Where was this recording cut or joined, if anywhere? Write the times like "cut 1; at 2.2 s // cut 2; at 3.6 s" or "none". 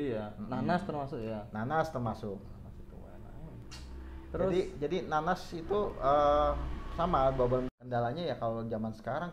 cut 1; at 7.7 s

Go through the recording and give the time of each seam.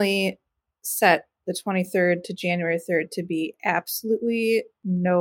none

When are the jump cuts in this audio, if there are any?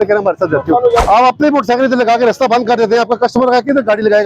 cut 1; at 1.0 s

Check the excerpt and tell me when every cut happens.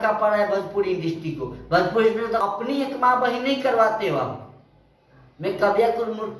cut 1; at 2.4 s

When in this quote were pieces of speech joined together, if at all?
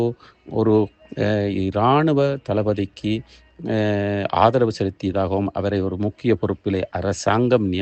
none

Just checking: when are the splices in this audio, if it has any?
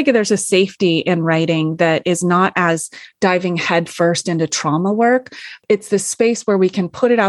cut 1; at 5.5 s

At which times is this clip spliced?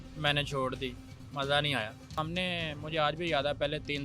cut 1; at 2.2 s

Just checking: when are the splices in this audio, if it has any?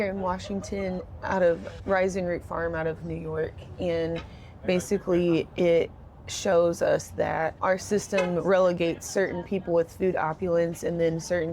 cut 1; at 1.7 s // cut 2; at 7.6 s

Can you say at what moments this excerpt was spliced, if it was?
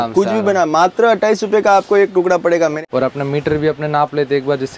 cut 1; at 2.8 s

